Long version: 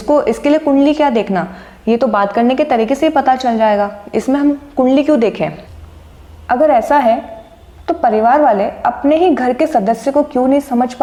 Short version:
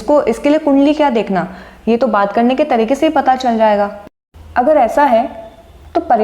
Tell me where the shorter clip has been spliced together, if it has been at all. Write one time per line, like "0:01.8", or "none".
0:04.0